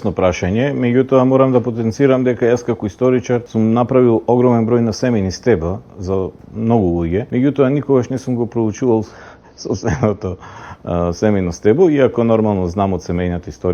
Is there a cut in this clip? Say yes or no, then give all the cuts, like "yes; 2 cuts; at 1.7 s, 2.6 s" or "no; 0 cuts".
yes; 2 cuts; at 3.5 s, 7.3 s